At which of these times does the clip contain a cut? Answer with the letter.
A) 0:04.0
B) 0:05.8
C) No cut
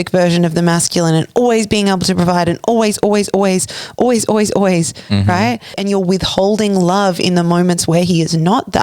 B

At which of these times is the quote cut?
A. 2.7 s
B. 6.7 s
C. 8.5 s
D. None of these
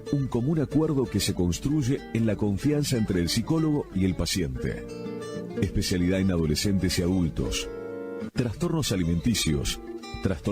D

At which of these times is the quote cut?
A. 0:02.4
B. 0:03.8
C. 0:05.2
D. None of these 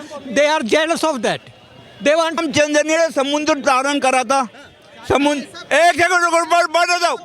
A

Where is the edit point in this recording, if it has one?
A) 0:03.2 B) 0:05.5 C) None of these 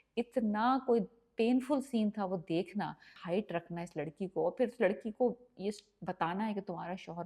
A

